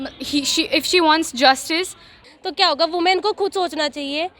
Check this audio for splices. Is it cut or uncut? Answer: cut